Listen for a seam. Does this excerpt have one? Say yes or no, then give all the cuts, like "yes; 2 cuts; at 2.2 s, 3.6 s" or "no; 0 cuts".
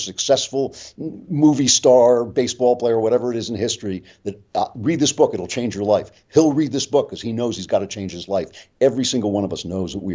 no; 0 cuts